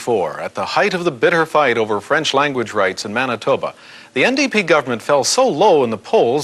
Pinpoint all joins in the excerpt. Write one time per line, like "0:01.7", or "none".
none